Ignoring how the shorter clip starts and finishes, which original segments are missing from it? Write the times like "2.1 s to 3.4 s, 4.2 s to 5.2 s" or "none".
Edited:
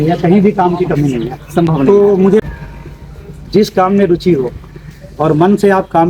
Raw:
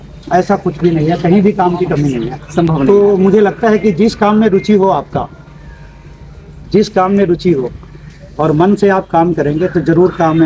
3.4 s to 5.6 s

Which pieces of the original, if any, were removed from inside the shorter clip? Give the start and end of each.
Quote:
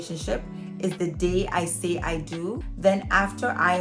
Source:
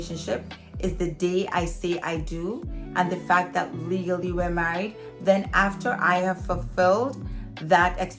2.7 s to 5.1 s

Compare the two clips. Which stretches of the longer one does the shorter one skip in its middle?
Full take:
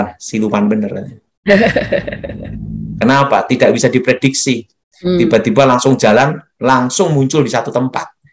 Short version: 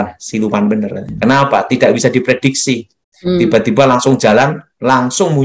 1.1 s to 2.8 s

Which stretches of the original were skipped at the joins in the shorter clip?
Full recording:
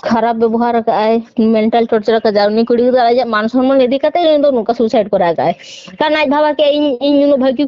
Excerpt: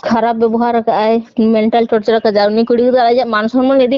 none

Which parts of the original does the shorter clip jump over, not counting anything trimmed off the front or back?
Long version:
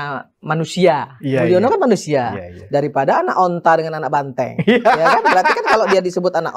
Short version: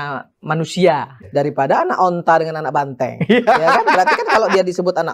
1.1 s to 2.5 s

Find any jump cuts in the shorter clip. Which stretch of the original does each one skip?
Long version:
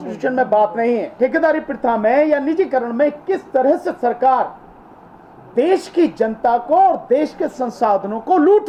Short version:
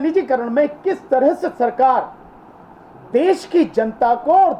none

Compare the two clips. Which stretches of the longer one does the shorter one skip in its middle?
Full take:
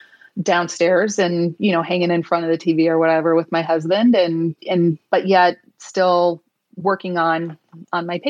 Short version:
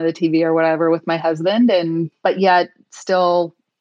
4.6 s to 5.0 s

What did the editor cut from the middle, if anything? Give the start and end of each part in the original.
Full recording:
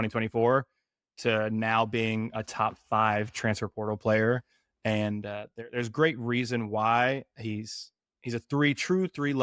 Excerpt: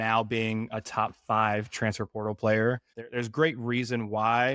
4.6 s to 5.6 s

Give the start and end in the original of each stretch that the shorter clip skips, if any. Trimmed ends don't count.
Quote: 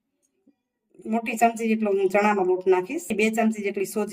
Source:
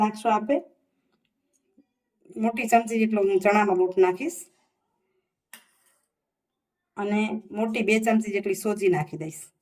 4.4 s to 7.8 s

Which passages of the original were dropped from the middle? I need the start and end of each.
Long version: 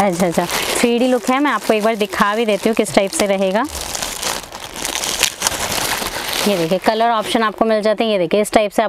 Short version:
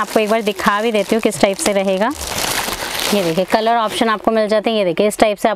3.8 s to 5.6 s

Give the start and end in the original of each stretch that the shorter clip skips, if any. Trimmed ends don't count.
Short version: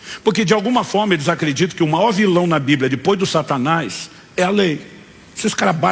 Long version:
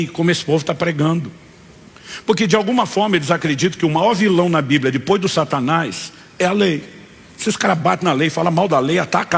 none

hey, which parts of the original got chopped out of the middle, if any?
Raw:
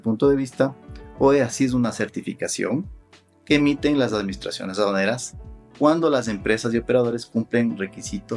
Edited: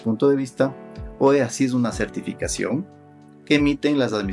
none

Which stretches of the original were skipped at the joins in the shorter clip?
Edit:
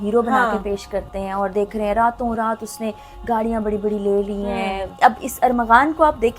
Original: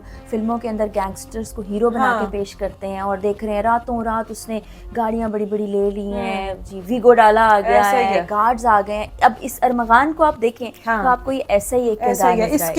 6.6 s to 9.1 s

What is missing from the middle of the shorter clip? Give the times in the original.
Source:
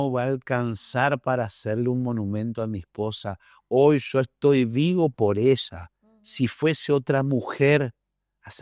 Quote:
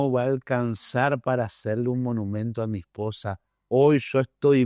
none

